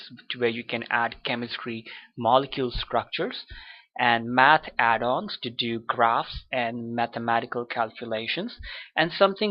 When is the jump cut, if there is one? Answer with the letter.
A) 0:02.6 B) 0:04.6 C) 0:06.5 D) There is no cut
B